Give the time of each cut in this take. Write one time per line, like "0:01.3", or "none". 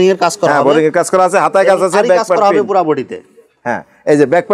none